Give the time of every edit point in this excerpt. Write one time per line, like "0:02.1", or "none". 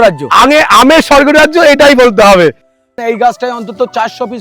0:02.7